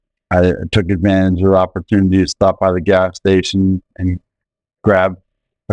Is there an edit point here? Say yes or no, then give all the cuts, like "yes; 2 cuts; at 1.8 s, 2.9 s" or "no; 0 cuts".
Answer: no; 0 cuts